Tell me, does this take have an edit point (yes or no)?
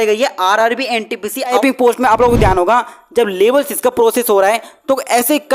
yes